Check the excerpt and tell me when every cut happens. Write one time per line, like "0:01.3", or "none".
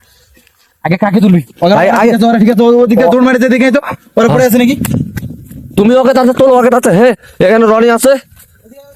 none